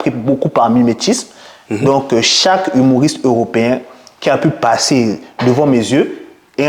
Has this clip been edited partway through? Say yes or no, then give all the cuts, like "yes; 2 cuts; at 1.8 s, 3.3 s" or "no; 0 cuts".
no; 0 cuts